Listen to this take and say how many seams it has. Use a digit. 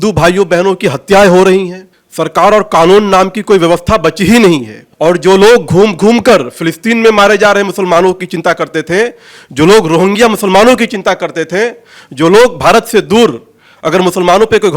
0